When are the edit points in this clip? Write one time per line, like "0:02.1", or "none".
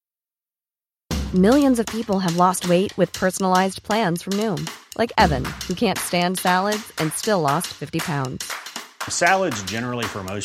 none